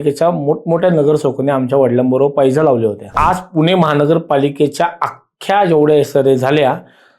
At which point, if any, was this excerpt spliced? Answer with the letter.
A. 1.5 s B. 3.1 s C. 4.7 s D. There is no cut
B